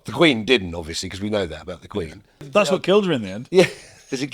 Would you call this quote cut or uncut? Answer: cut